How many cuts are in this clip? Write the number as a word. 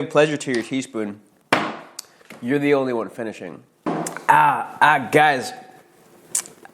one